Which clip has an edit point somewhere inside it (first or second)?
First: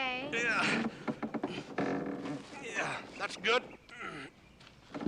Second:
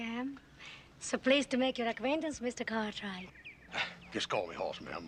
first